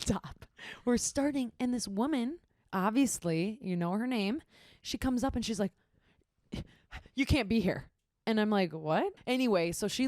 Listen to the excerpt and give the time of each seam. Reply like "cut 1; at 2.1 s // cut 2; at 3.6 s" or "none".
cut 1; at 9.2 s